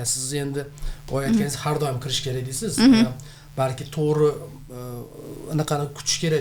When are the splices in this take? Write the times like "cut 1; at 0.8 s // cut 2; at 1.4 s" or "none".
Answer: none